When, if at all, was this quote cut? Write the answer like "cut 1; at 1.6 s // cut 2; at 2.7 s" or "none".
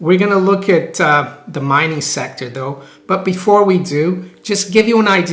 none